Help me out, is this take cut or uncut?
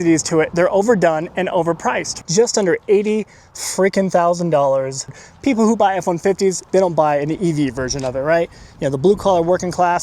cut